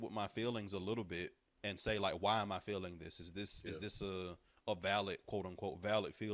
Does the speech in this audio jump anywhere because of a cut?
no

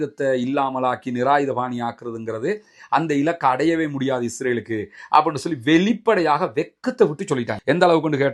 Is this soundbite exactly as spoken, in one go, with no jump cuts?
yes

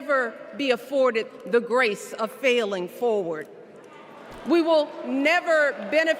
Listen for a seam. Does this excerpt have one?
yes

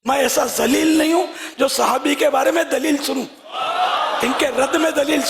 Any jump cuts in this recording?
no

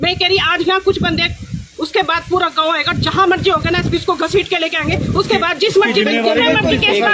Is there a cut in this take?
no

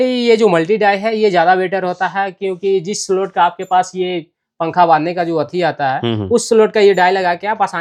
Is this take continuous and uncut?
yes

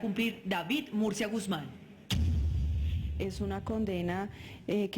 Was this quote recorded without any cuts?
no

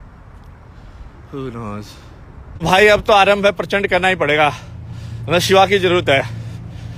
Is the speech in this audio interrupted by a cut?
yes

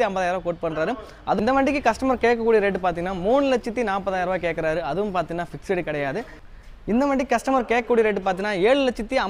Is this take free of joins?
no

